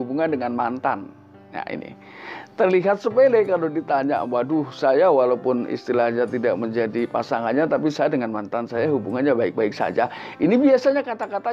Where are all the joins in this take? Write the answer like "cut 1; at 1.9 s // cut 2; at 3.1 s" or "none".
none